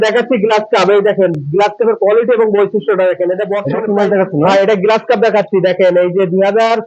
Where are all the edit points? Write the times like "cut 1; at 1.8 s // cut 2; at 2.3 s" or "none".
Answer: cut 1; at 3.7 s